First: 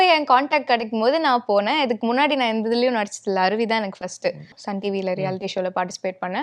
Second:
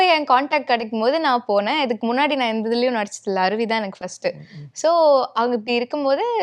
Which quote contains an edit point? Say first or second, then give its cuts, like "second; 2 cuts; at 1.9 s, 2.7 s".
first; 1 cut; at 4.6 s